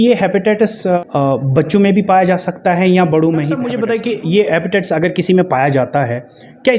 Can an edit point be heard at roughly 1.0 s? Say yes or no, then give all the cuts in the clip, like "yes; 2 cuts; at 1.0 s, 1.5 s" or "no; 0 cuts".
yes; 2 cuts; at 1.0 s, 3.7 s